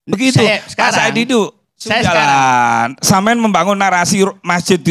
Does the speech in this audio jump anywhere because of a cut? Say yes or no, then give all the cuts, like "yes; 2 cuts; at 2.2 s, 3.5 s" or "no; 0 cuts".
no; 0 cuts